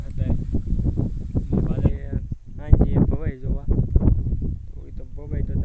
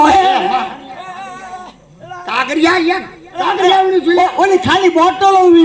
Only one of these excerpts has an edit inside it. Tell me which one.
first; 1 cut; at 1.7 s

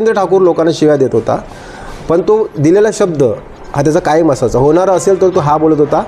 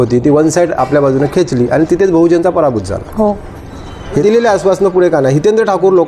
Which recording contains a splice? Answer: second; 1 cut; at 4.2 s

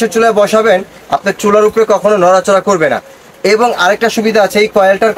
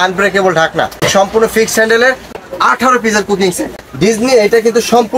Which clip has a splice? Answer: second; 3 cuts; at 1.1 s, 2.3 s, 3.8 s

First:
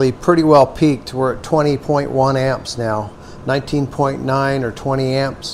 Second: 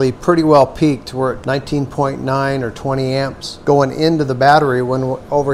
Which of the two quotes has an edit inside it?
second; 2 cuts; at 1.4 s, 3.5 s

